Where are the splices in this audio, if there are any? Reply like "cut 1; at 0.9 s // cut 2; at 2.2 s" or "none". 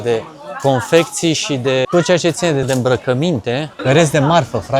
cut 1; at 1.9 s // cut 2; at 2.7 s // cut 3; at 3.7 s